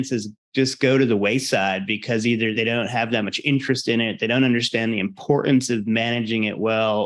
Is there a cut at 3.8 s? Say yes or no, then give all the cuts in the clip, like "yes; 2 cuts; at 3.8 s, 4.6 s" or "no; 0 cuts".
no; 1 cut; at 2.5 s